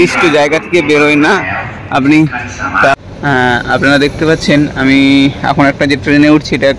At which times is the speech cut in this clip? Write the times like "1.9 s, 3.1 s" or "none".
3.0 s